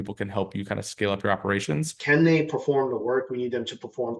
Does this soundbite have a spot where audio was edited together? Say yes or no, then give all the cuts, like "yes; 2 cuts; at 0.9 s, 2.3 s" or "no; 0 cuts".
yes; 1 cut; at 1.9 s